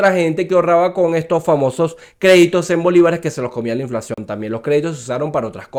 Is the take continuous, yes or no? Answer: yes